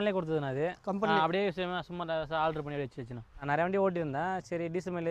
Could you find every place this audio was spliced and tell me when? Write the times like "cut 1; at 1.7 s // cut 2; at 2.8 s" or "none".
cut 1; at 3.4 s

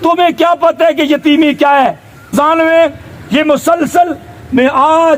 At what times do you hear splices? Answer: cut 1; at 2.3 s

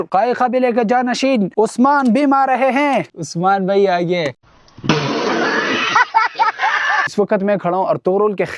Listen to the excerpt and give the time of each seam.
cut 1; at 7.1 s

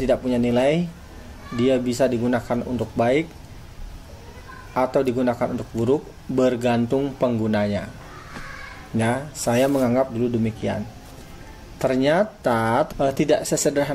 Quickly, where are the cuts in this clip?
cut 1; at 12.9 s

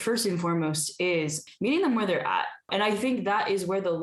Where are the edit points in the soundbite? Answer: cut 1; at 1.4 s // cut 2; at 2.7 s

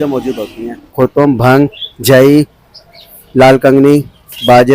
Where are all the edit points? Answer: cut 1; at 0.9 s

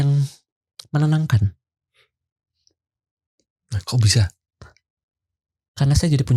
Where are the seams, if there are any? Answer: none

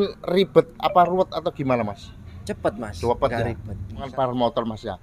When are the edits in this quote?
cut 1; at 4.1 s

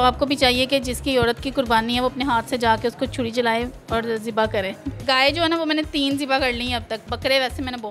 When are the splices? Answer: cut 1; at 5.0 s // cut 2; at 7.0 s

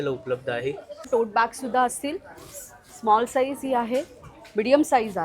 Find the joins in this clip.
cut 1; at 1.1 s

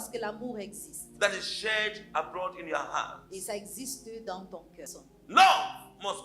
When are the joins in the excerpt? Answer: cut 1; at 4.8 s

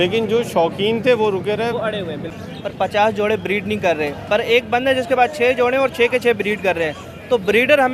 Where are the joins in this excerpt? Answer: cut 1; at 2.3 s

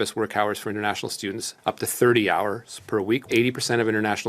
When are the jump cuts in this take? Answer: cut 1; at 3.2 s

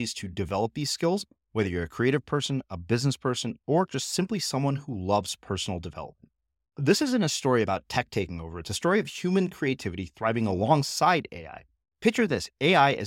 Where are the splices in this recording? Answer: none

